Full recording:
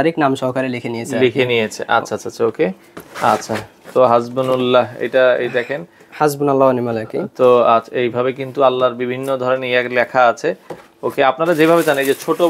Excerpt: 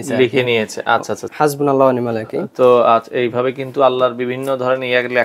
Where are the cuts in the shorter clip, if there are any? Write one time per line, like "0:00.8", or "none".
0:01.2